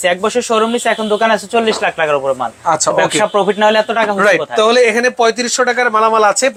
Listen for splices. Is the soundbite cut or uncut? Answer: uncut